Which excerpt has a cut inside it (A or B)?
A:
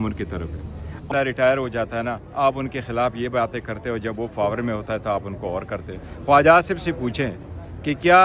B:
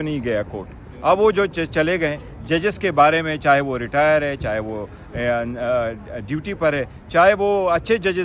A